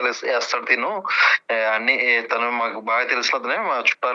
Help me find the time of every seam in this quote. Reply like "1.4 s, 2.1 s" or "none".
none